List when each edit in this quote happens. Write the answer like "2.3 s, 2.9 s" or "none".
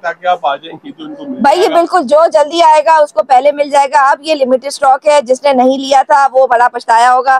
none